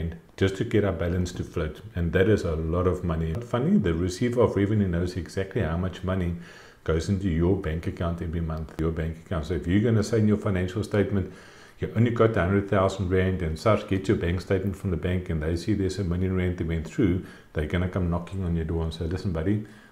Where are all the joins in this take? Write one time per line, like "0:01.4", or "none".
0:03.4
0:08.7